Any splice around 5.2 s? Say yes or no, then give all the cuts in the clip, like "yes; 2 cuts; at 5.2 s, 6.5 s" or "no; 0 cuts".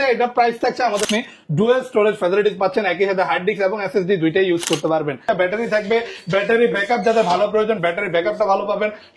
yes; 2 cuts; at 1.1 s, 5.2 s